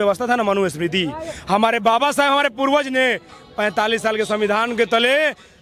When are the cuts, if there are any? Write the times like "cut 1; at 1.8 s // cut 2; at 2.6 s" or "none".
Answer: none